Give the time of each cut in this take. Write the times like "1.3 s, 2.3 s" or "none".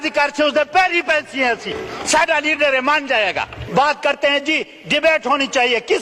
3.6 s